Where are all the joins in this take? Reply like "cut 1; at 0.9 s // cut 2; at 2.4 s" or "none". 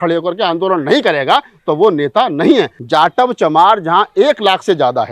cut 1; at 2.8 s